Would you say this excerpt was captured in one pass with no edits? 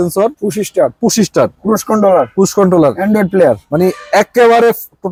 yes; 0 cuts

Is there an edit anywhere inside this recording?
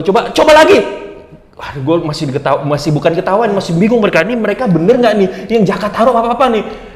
no; 0 cuts

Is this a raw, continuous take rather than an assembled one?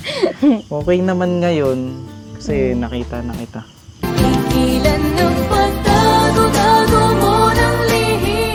yes; 0 cuts

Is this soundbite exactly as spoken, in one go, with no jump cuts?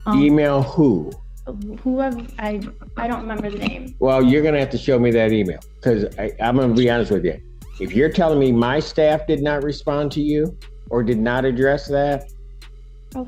yes; 0 cuts

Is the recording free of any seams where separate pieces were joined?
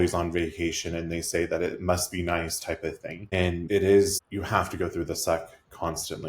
no; 2 cuts; at 3.6 s, 4.2 s

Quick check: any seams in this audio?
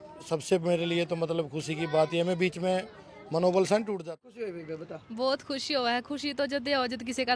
yes; 1 cut; at 4.0 s

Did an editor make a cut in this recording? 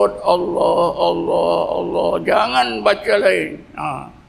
no; 0 cuts

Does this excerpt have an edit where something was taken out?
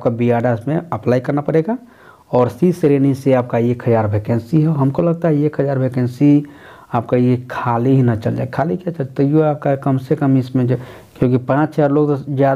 yes; 1 cut; at 11.0 s

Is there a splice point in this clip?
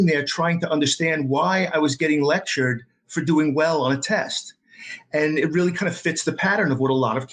no; 0 cuts

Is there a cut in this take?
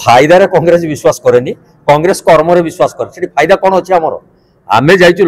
no; 0 cuts

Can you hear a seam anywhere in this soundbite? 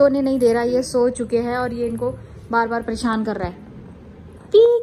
no; 0 cuts

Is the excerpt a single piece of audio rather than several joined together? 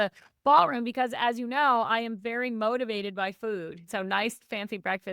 no; 1 cut; at 3.8 s

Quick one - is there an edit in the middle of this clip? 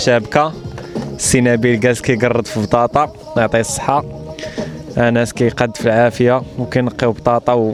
no; 0 cuts

